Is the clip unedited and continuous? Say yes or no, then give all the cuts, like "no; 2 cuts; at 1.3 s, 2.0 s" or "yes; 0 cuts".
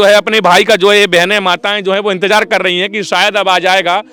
yes; 0 cuts